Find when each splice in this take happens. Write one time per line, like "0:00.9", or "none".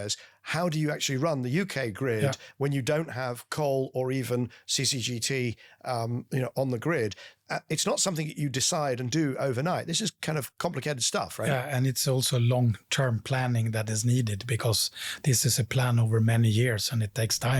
none